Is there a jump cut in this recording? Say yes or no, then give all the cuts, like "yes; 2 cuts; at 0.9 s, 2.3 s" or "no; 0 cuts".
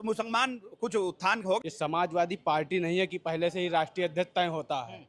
yes; 1 cut; at 1.6 s